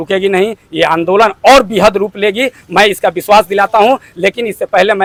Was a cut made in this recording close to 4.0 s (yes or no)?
no